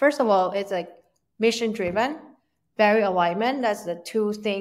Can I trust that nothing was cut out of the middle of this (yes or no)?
yes